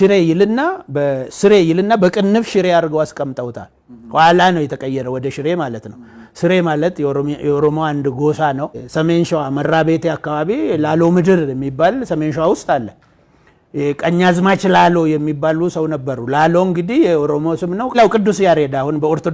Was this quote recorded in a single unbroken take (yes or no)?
no